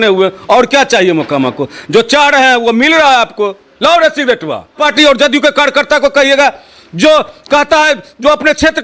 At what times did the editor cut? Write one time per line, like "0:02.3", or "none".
0:04.8